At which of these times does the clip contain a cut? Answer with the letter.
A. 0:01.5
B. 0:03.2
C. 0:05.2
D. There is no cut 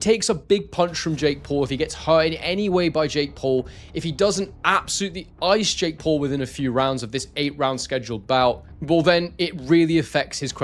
D